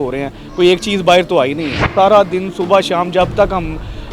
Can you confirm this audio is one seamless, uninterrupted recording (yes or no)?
no